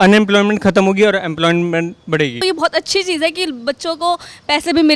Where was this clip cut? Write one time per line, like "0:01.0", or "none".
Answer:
0:02.4